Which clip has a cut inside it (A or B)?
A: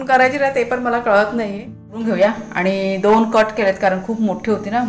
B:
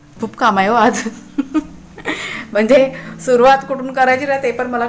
A